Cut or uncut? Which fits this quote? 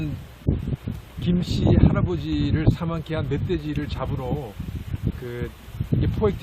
cut